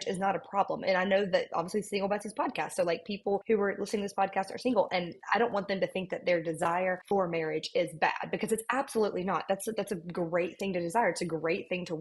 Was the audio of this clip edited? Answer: yes; 2 cuts; at 3.4 s, 7.0 s

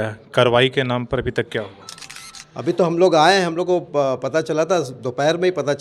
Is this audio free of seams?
yes; 0 cuts

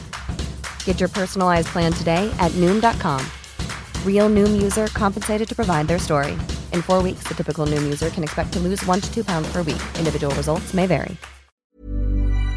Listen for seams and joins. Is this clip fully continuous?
no; 1 cut; at 11.6 s

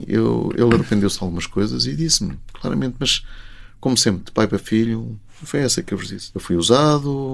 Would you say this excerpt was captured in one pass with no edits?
no; 1 cut; at 6.2 s

